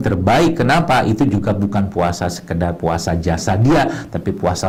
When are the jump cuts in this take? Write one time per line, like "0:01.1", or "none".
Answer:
none

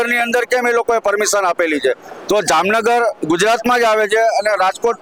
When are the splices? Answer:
none

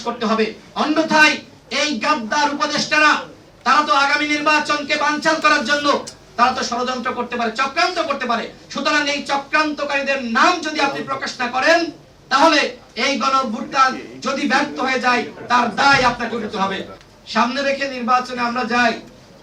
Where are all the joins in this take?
0:16.9

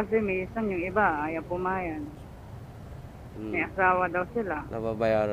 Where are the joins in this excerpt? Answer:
none

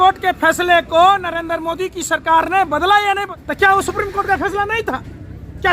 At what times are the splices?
0:03.4

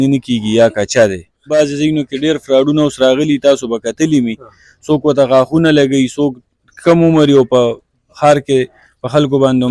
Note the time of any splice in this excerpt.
0:01.5

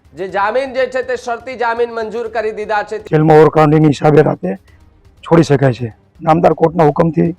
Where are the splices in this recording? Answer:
0:03.0
0:06.1

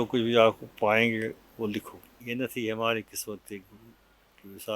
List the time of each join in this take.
0:02.1

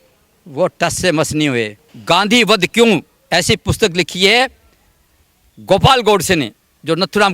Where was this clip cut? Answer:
0:01.9

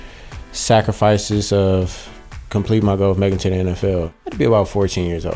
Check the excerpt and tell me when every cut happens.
0:04.1

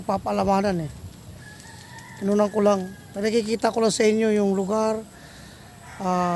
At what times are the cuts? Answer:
none

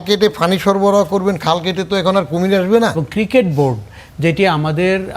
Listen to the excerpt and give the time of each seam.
0:03.0

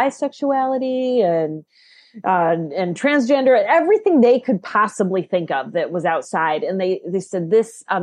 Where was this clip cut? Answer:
none

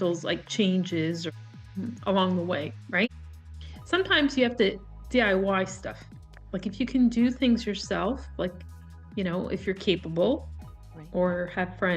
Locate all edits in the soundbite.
0:03.1

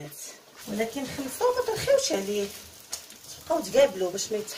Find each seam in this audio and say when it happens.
none

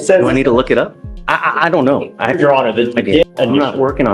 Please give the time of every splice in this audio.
0:03.2

